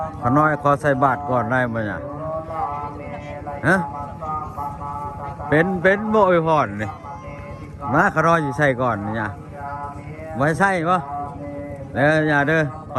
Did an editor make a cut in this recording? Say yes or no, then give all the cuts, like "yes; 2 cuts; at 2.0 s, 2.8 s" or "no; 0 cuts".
no; 0 cuts